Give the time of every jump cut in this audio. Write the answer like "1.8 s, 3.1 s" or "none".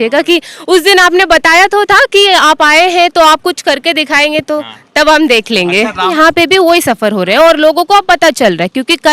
6.1 s